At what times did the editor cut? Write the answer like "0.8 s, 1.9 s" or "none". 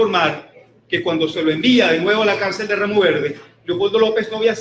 2.0 s